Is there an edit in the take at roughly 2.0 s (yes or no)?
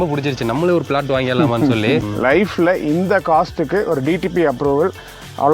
yes